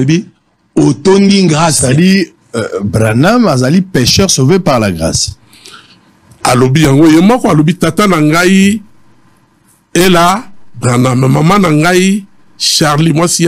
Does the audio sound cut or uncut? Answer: cut